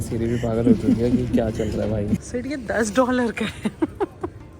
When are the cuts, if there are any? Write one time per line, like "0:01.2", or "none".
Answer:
0:02.2